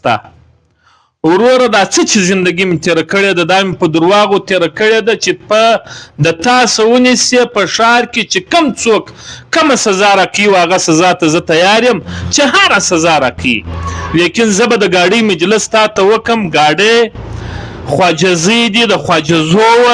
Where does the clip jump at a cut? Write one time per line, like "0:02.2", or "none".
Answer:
none